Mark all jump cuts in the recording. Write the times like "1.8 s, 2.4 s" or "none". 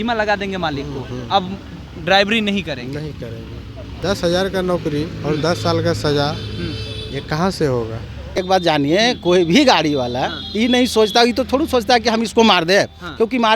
3.9 s, 8.4 s